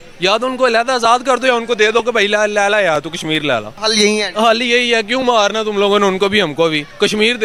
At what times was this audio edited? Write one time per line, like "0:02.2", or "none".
none

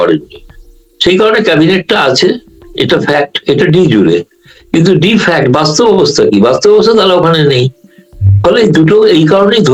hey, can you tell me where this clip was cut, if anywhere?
none

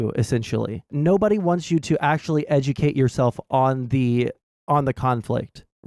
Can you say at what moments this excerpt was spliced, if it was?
0:00.9

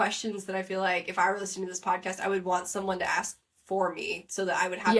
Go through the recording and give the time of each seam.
none

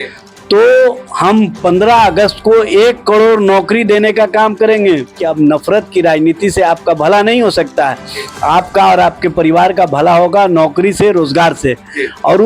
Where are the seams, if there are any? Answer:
0:05.2

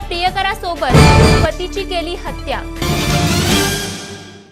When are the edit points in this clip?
0:02.7

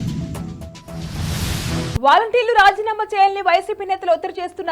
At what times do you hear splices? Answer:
0:01.4

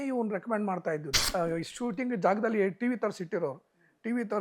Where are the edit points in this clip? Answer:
0:01.2

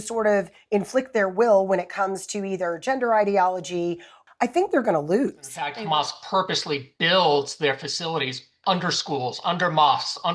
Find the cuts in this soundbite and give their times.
0:04.1
0:05.8

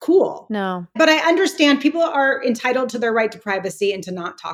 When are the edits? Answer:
0:00.9

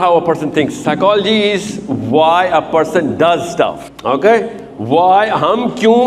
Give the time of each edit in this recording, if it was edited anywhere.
0:03.9

